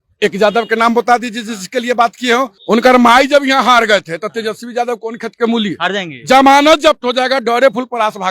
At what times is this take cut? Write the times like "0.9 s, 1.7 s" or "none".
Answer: 2.6 s